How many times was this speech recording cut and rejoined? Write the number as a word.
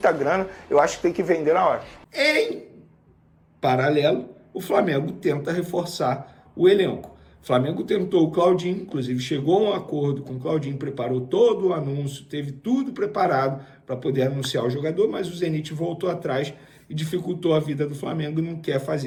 zero